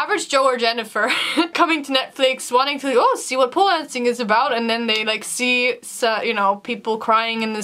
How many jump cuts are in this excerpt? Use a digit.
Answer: 0